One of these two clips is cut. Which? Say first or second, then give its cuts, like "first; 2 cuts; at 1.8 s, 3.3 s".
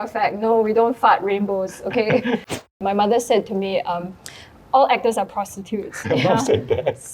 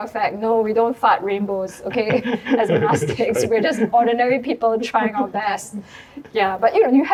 first; 2 cuts; at 2.5 s, 6.0 s